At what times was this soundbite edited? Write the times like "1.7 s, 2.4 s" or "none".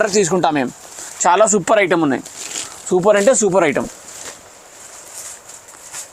none